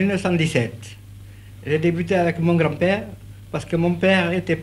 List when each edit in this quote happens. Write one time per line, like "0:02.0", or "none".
none